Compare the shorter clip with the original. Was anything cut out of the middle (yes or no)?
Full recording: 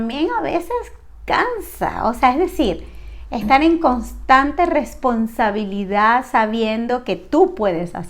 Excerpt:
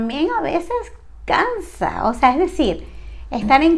no